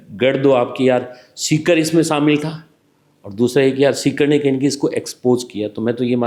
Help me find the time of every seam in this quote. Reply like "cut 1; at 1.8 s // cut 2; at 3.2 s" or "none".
none

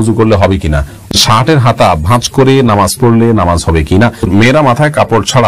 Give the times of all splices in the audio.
cut 1; at 1.1 s // cut 2; at 4.3 s

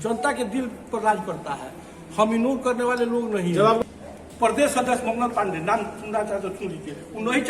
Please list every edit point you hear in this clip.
cut 1; at 3.8 s

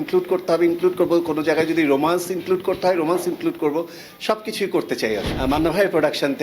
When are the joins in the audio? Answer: cut 1; at 5.3 s

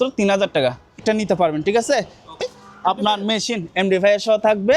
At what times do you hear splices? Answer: cut 1; at 1.0 s // cut 2; at 2.4 s

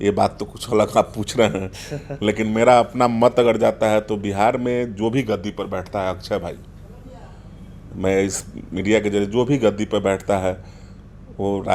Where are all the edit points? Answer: none

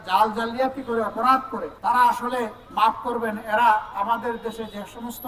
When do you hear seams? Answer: cut 1; at 1.6 s // cut 2; at 2.6 s

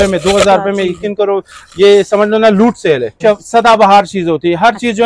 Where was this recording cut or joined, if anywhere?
cut 1; at 3.2 s

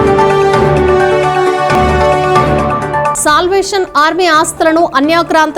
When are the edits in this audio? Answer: none

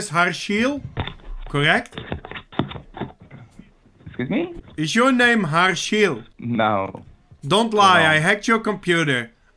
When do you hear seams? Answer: cut 1; at 1.0 s // cut 2; at 4.6 s // cut 3; at 6.3 s

